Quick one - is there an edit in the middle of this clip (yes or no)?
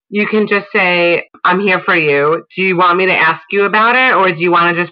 yes